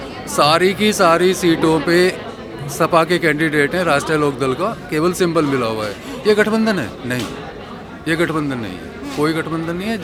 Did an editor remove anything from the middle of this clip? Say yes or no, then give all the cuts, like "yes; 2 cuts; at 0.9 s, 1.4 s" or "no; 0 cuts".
no; 0 cuts